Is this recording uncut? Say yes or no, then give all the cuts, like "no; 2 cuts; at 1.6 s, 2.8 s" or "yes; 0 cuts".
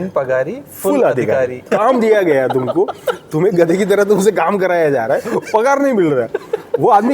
no; 1 cut; at 1.6 s